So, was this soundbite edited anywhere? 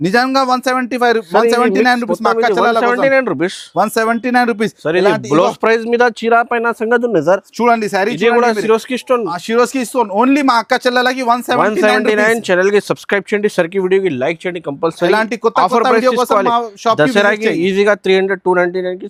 no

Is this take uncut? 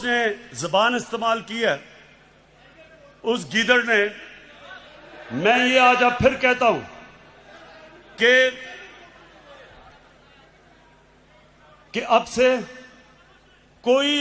yes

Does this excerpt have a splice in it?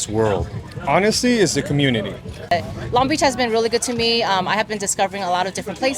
yes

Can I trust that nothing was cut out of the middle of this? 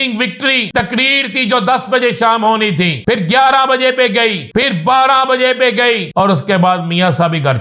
no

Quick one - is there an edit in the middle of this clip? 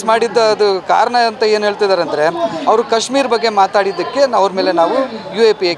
no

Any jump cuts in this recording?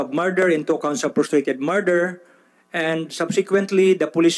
no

